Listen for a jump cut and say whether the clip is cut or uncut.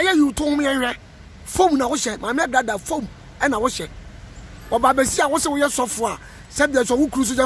uncut